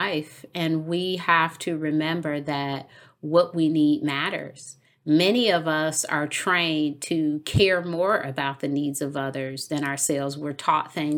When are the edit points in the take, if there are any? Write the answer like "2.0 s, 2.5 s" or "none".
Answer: none

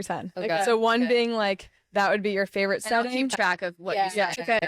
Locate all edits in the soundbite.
none

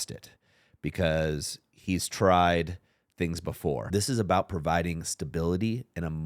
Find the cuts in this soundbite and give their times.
3.8 s

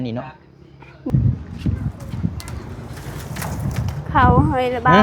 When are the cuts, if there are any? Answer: 1.1 s

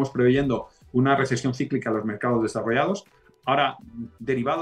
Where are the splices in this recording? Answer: none

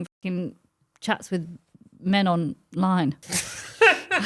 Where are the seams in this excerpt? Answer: none

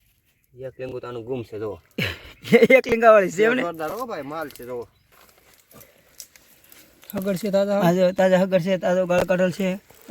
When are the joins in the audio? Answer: 5.1 s

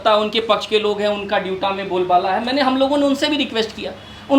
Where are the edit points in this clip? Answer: none

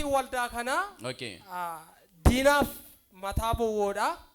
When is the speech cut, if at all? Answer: none

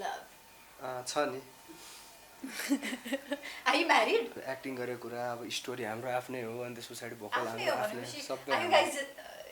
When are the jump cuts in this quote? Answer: 4.4 s

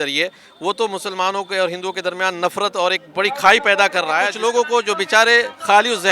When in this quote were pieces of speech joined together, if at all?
4.3 s

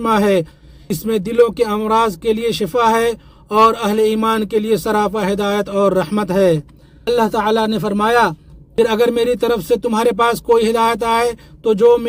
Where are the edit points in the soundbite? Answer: none

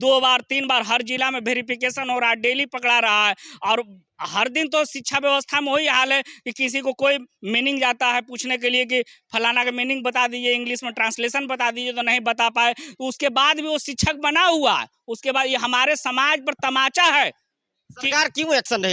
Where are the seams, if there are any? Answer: none

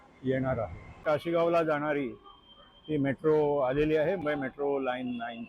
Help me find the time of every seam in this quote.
1.0 s, 4.2 s

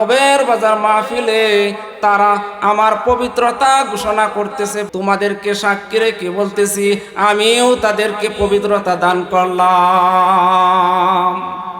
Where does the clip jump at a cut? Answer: 4.8 s

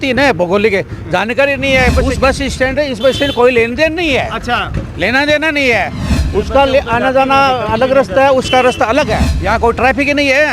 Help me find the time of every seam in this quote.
2.1 s, 9.3 s

